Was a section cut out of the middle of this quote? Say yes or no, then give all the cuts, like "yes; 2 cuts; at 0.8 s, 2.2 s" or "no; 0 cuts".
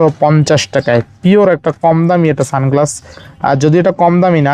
no; 0 cuts